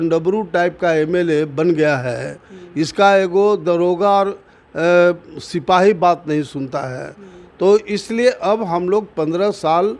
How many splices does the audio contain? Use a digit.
0